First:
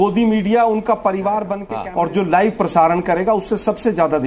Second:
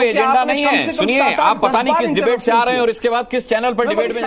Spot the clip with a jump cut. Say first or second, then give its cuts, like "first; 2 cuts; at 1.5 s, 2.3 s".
first; 1 cut; at 1.6 s